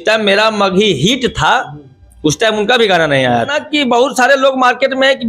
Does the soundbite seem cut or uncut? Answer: cut